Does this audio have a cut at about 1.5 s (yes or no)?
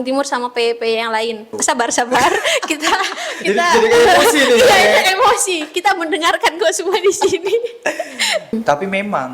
yes